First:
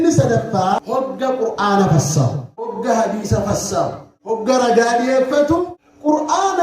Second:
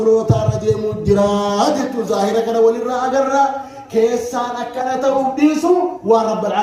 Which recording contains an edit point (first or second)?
first